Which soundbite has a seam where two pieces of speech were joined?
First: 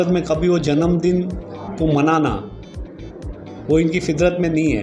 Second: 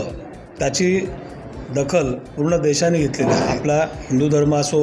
second; 1 cut; at 3.2 s

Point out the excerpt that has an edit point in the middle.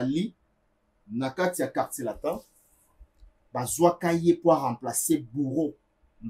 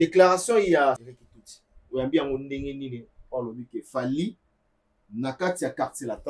second; 1 cut; at 1.0 s

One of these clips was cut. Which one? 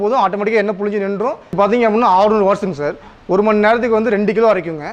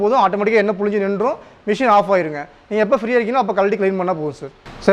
first; 1 cut; at 1.6 s

